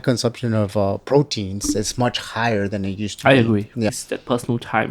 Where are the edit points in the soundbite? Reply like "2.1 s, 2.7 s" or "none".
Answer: 3.9 s